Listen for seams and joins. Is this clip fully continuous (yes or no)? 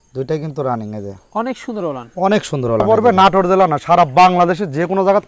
no